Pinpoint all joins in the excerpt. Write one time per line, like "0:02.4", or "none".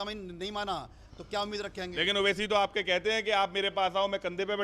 0:01.0